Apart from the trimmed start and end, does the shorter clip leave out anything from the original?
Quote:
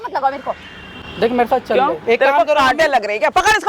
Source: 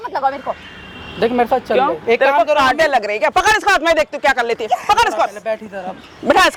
no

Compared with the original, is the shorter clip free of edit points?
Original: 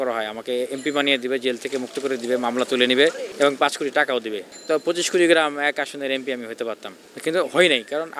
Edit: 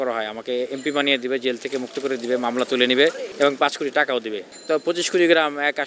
yes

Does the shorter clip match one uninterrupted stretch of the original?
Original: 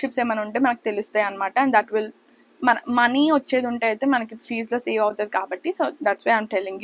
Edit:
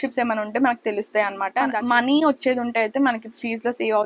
no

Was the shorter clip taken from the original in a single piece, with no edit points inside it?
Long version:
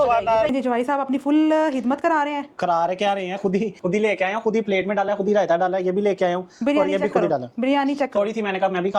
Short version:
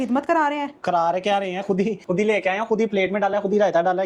yes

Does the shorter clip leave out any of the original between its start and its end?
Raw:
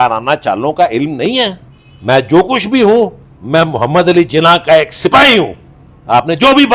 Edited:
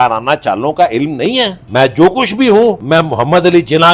yes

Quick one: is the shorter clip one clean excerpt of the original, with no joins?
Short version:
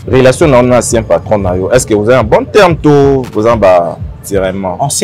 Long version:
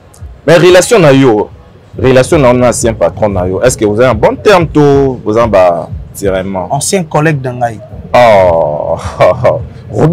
yes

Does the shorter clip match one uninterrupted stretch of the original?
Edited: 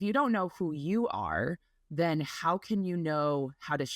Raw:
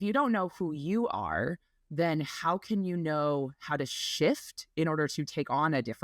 yes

